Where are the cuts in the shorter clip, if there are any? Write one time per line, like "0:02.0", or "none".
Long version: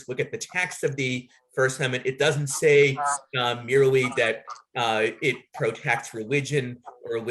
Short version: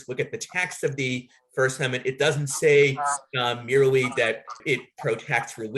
0:04.6